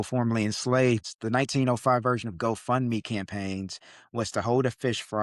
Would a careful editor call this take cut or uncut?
cut